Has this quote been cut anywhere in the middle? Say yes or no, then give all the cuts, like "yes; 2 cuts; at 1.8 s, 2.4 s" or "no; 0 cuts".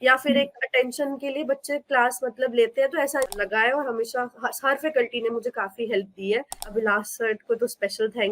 yes; 2 cuts; at 3.3 s, 6.6 s